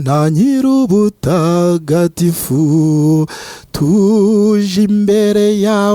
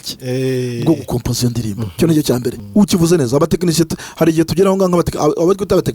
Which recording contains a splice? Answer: second; 1 cut; at 2.6 s

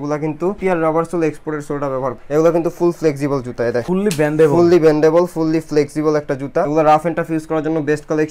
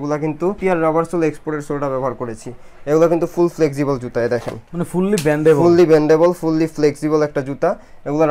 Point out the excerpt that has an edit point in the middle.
first; 3 cuts; at 2.2 s, 3.8 s, 6.7 s

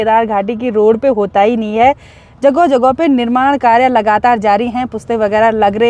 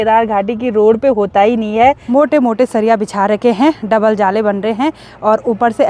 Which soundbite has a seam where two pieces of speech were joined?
second; 1 cut; at 2.0 s

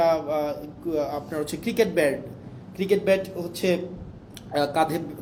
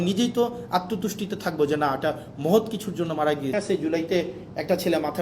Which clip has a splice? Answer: second; 1 cut; at 3.5 s

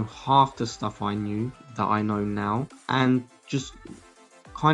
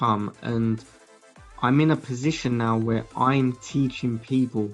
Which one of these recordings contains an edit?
first; 2 cuts; at 1.6 s, 2.8 s

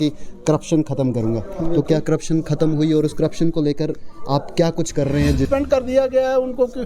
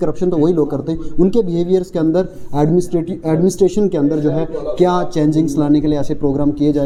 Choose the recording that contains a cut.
first; 1 cut; at 5.5 s

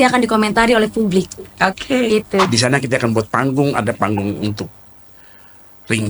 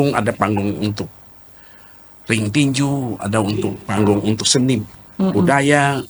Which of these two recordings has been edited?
first; 1 cut; at 2.5 s

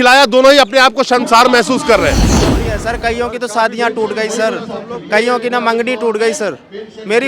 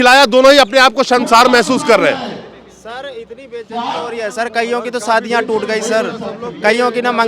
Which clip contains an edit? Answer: first; 1 cut; at 2.4 s

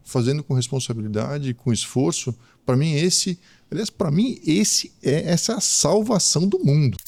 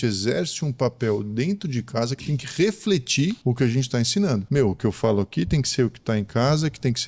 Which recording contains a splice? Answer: second; 2 cuts; at 3.4 s, 4.5 s

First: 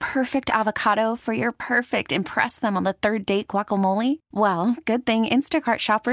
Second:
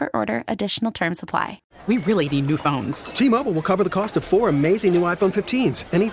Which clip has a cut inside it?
second; 1 cut; at 1.7 s

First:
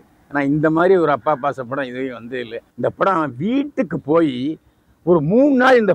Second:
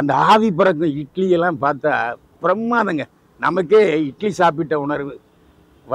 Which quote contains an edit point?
first; 1 cut; at 2.6 s

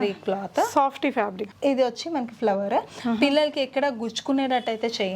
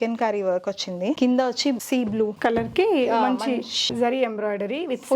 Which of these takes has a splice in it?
second; 3 cuts; at 1.2 s, 2.3 s, 3.9 s

